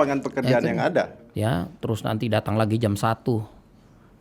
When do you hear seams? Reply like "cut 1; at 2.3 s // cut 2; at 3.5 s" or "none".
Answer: cut 1; at 1.2 s